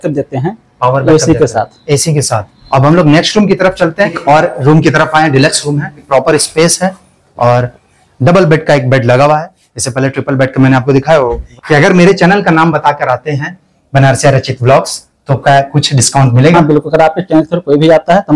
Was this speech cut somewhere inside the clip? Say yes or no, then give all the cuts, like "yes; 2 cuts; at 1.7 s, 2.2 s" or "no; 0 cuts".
yes; 4 cuts; at 2.5 s, 4.2 s, 6.0 s, 11.4 s